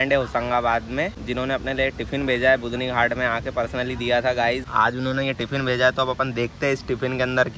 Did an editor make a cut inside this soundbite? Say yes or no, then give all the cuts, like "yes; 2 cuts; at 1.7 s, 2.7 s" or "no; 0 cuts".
yes; 2 cuts; at 1.2 s, 4.7 s